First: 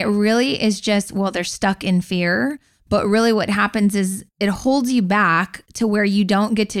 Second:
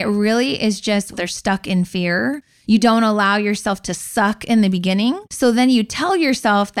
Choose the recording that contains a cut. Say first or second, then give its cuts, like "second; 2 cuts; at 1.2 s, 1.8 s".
second; 3 cuts; at 1.1 s, 2.5 s, 5.3 s